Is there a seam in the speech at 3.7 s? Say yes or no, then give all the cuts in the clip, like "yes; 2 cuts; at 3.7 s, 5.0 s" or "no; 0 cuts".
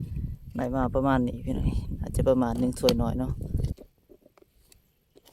yes; 1 cut; at 3.7 s